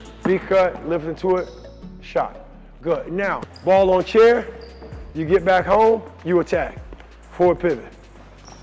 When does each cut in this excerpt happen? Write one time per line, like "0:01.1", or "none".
0:03.5